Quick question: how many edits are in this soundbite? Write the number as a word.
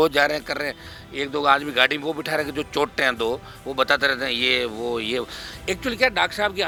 zero